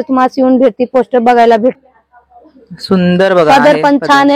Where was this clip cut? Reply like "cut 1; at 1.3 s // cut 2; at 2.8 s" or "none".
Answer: cut 1; at 1.8 s